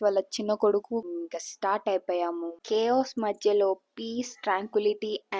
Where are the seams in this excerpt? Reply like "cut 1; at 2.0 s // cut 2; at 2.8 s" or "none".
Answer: cut 1; at 1.0 s // cut 2; at 2.5 s